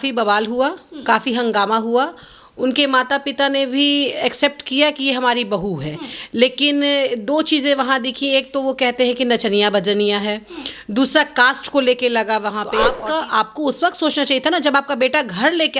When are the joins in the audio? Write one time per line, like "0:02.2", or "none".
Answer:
0:12.9